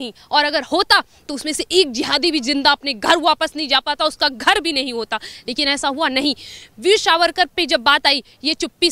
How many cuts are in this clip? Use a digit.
0